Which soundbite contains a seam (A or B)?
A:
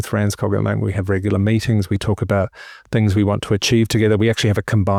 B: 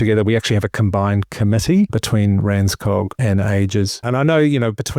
B